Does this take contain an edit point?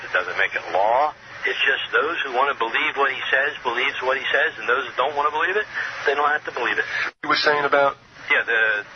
no; 0 cuts

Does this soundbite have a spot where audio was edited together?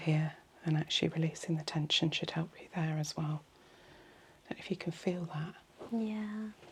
no; 0 cuts

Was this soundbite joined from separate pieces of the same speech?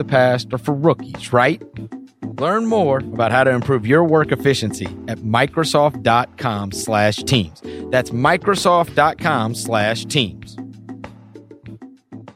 yes; 1 cut; at 10.3 s

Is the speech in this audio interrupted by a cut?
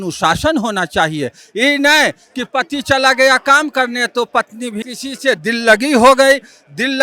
yes; 1 cut; at 4.8 s

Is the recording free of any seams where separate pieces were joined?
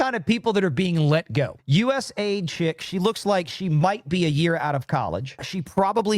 no; 1 cut; at 1.5 s

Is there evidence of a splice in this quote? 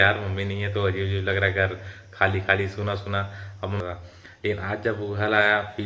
yes; 1 cut; at 3.8 s

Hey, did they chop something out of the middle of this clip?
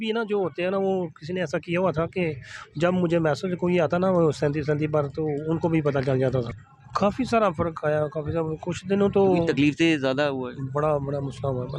yes; 1 cut; at 6.6 s

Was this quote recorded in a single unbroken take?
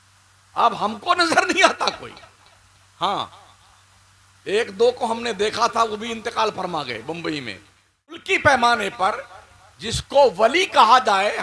no; 1 cut; at 8.2 s

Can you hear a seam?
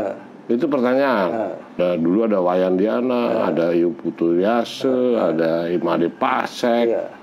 yes; 1 cut; at 1.8 s

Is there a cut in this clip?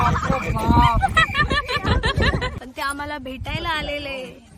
yes; 1 cut; at 2.5 s

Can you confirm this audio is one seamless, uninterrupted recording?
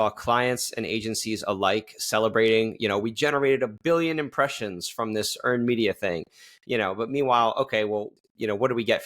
no; 1 cut; at 8.1 s

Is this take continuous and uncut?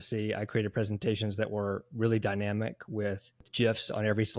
no; 1 cut; at 3.5 s

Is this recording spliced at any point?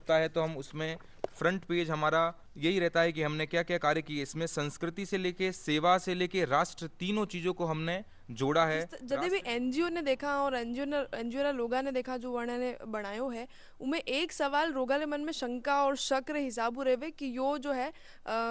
yes; 2 cuts; at 2.4 s, 9.0 s

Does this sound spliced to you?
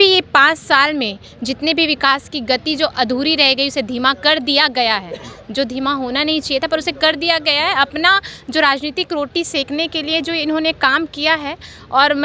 no; 0 cuts

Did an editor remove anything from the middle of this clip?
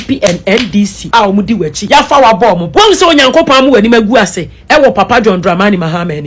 no; 0 cuts

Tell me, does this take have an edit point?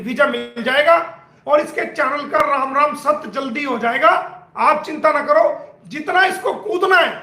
yes; 1 cut; at 1.3 s

